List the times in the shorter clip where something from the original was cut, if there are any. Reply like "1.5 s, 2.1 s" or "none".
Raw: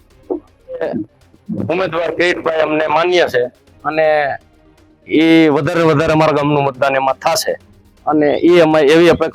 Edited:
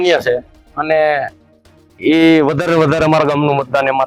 none